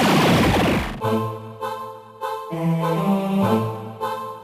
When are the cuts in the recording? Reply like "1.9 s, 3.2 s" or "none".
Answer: 0.9 s